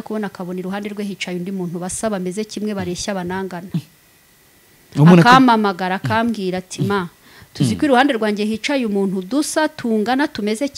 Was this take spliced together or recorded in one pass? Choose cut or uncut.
uncut